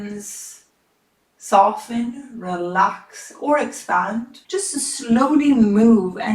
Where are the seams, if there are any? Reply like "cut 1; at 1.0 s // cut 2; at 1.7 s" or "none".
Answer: cut 1; at 4.3 s